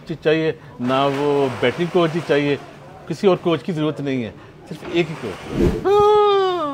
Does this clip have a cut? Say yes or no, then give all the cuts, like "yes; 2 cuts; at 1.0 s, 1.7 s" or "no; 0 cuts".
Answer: yes; 1 cut; at 5.7 s